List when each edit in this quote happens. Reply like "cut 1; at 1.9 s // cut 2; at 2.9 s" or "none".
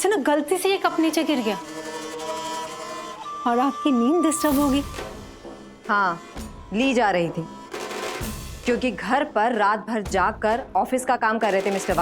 cut 1; at 4.9 s